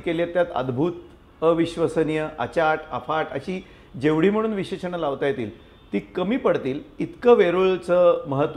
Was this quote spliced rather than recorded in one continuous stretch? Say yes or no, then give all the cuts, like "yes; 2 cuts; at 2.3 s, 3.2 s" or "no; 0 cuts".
no; 0 cuts